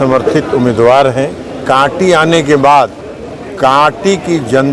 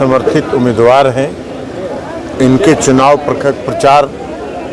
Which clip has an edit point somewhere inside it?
first; 1 cut; at 1.6 s

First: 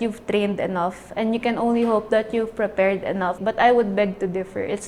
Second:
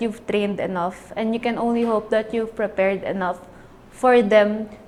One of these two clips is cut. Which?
first; 1 cut; at 3.4 s

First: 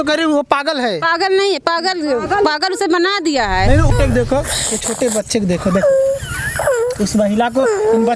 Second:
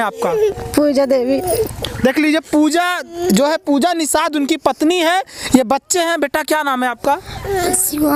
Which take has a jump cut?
first; 1 cut; at 3.9 s

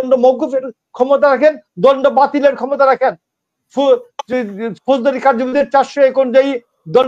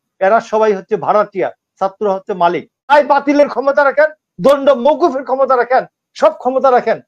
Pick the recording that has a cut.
second; 1 cut; at 2.9 s

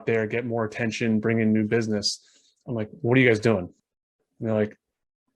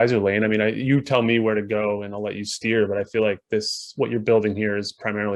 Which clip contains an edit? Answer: first; 1 cut; at 3.7 s

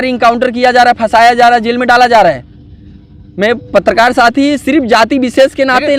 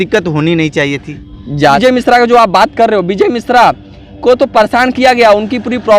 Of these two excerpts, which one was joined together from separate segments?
second; 1 cut; at 1.8 s

